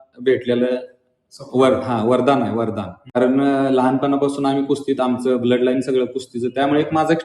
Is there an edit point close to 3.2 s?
yes; 1 cut; at 3.2 s

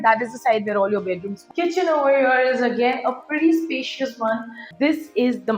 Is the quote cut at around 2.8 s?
no; 2 cuts; at 1.4 s, 4.7 s

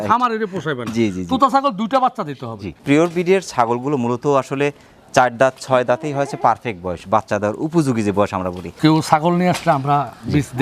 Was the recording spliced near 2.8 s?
yes; 2 cuts; at 2.8 s, 8.7 s

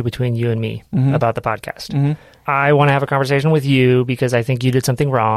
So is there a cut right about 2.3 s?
yes; 1 cut; at 2.3 s

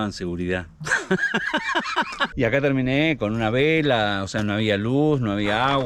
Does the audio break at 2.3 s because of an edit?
yes; 1 cut; at 2.3 s

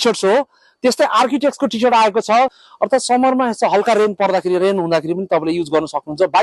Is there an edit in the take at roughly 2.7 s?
yes; 1 cut; at 2.7 s

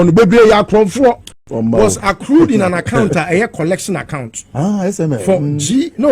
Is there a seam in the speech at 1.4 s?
yes; 1 cut; at 1.4 s

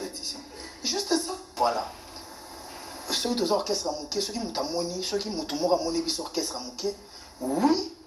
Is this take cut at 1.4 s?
yes; 1 cut; at 1.4 s

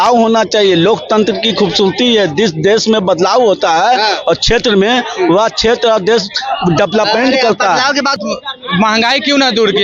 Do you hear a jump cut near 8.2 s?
yes; 1 cut; at 8.2 s

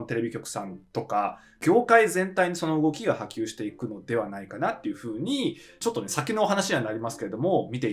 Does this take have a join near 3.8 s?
no; 1 cut; at 1.5 s

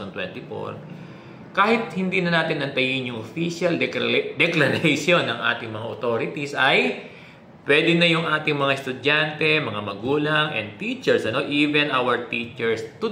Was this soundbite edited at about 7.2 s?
no; 0 cuts

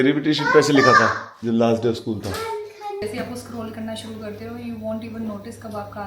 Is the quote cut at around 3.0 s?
yes; 1 cut; at 3.0 s

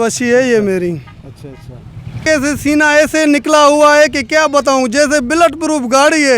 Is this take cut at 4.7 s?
no; 1 cut; at 2.2 s

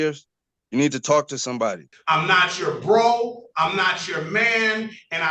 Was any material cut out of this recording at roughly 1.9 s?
yes; 1 cut; at 1.9 s

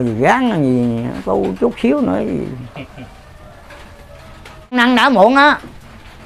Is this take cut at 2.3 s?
no; 1 cut; at 4.8 s

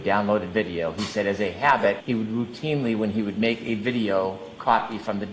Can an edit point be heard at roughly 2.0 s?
yes; 1 cut; at 2.0 s

